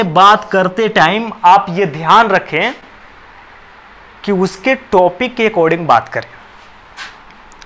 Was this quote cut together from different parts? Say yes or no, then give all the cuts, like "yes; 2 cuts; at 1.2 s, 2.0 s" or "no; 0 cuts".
no; 0 cuts